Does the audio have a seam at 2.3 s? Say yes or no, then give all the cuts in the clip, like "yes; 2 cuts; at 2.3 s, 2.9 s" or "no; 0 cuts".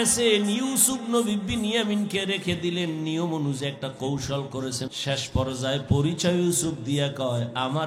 no; 1 cut; at 4.9 s